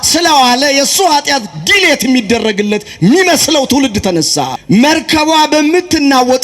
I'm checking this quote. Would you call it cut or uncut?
cut